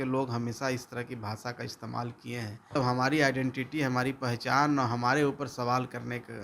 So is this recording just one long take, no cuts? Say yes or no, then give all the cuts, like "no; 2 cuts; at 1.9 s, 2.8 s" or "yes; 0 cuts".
no; 1 cut; at 2.8 s